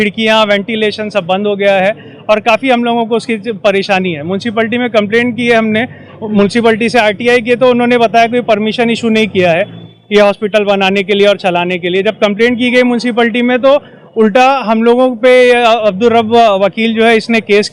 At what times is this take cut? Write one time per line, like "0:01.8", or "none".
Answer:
none